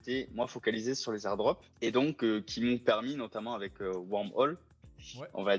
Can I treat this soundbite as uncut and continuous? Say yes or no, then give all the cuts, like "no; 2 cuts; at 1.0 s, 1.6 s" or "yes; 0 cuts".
no; 1 cut; at 1.7 s